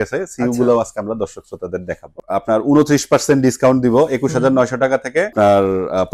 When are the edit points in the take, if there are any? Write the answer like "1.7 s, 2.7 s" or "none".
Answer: 2.2 s, 5.3 s

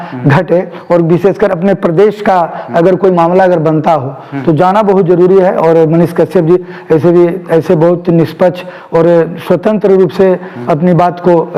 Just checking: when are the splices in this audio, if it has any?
none

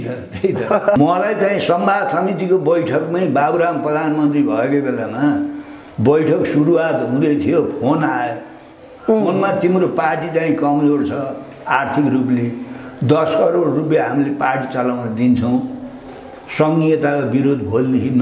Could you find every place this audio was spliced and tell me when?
1.0 s

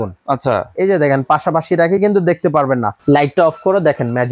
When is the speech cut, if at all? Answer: 2.9 s

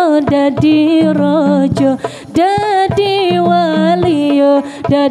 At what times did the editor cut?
none

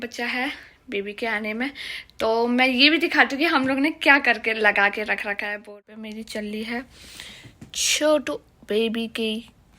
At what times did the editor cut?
5.7 s

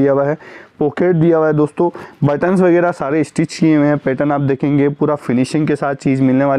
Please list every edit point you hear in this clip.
none

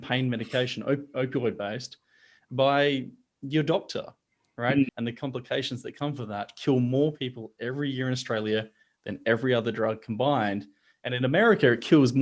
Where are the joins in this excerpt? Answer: 4.9 s

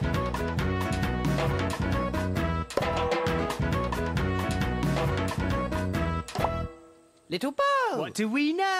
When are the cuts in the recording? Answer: none

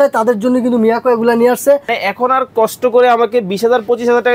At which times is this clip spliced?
1.9 s

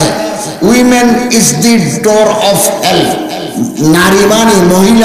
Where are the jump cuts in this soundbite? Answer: 0.7 s, 3.4 s

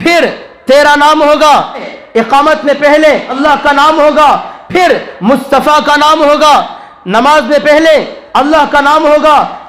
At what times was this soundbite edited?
1.9 s, 3.3 s

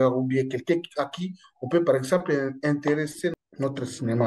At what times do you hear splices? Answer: 3.3 s

